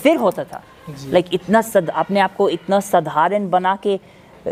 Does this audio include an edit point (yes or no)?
no